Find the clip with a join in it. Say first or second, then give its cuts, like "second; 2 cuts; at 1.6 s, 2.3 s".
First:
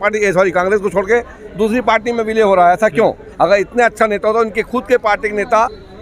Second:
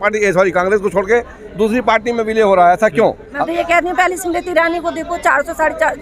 second; 1 cut; at 3.4 s